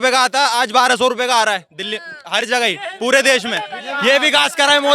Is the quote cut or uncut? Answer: uncut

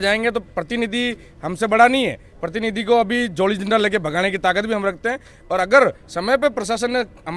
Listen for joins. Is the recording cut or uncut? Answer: uncut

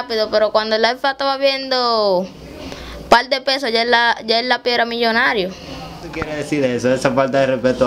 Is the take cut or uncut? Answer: cut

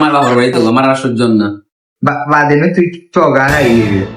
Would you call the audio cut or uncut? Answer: cut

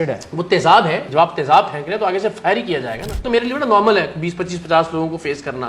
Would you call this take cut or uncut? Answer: cut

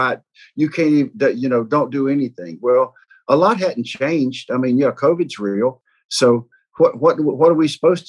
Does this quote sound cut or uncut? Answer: cut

